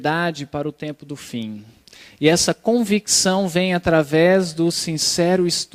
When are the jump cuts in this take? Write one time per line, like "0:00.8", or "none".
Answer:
0:01.9